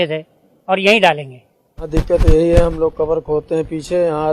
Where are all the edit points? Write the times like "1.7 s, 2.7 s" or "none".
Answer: 1.9 s